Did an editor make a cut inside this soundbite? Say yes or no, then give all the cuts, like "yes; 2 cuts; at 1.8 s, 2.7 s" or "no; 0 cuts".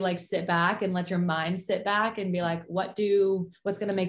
no; 0 cuts